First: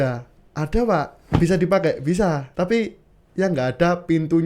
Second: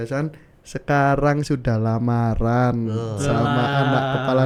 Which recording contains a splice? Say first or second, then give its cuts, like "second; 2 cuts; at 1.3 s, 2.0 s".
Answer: first; 2 cuts; at 1.2 s, 2.5 s